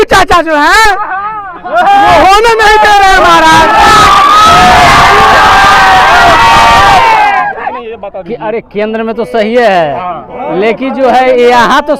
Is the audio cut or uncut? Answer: cut